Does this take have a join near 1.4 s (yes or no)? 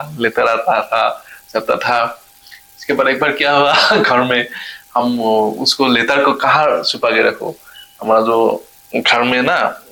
no